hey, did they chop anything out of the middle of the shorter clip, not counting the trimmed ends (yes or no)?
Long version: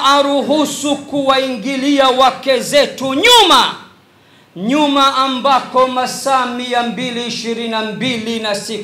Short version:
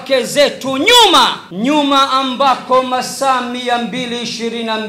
yes